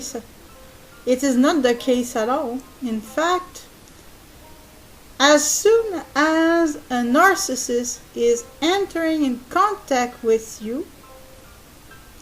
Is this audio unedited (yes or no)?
no